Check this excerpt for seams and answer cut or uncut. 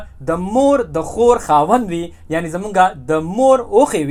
uncut